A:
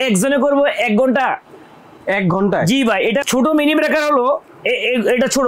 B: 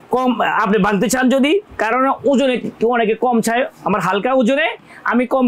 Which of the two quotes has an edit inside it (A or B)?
A